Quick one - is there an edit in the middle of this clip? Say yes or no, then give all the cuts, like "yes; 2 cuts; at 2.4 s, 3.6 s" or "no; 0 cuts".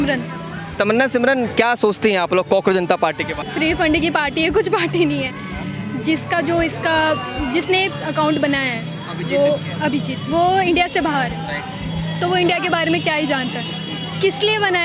no; 0 cuts